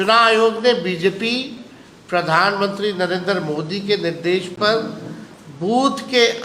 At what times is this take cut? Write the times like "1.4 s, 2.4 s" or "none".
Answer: none